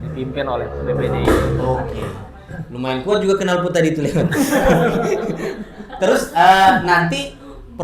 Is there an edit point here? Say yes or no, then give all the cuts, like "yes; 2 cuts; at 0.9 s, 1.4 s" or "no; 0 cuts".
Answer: no; 0 cuts